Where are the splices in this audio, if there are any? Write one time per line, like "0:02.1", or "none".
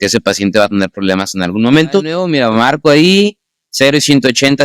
0:02.2